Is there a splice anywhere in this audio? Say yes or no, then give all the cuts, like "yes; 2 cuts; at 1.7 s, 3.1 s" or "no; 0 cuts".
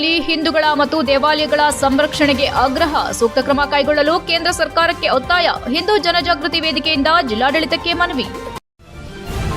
yes; 1 cut; at 8.6 s